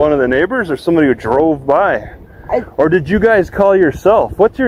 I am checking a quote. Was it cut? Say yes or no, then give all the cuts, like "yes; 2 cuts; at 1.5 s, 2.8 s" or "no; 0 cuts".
no; 0 cuts